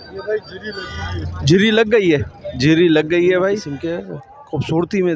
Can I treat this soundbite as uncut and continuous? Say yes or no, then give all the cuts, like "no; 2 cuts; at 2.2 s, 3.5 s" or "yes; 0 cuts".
no; 1 cut; at 3.7 s